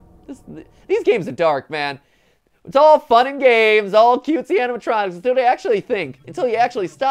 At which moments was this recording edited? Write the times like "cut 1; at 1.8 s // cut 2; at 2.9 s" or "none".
none

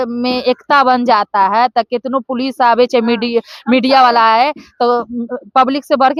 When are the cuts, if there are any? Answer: none

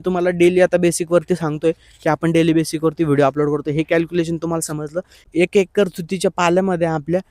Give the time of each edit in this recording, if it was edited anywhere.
cut 1; at 5.3 s

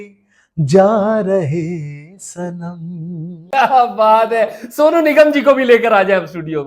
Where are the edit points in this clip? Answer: cut 1; at 3.4 s

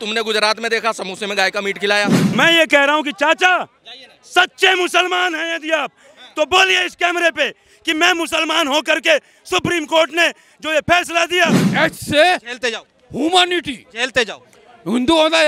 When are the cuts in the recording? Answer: cut 1; at 2.2 s // cut 2; at 11.6 s

